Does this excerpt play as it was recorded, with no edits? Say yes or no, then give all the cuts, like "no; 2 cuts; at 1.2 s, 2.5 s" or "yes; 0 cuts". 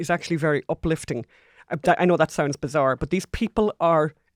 yes; 0 cuts